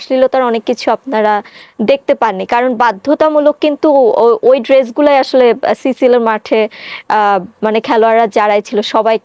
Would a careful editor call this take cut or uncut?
uncut